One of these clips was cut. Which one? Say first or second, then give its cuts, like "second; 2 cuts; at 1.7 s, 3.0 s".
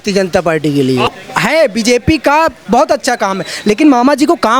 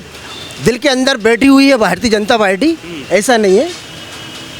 first; 1 cut; at 1.1 s